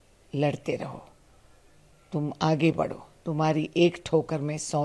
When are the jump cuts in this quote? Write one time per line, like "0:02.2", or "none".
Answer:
none